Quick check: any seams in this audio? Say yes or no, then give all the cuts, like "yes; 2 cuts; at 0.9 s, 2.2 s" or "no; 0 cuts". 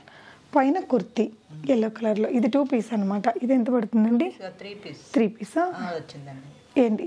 no; 0 cuts